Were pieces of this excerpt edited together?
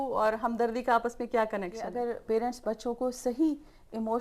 yes; 1 cut; at 1.9 s

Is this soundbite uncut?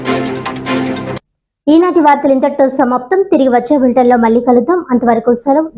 yes; 0 cuts

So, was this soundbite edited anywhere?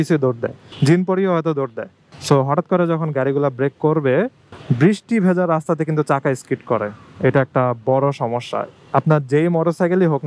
no; 0 cuts

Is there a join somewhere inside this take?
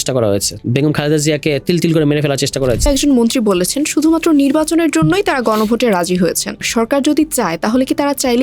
yes; 2 cuts; at 2.9 s, 6.7 s

